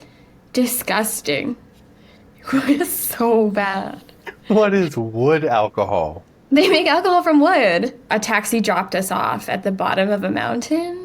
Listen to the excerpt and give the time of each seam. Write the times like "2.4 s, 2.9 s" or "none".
8.0 s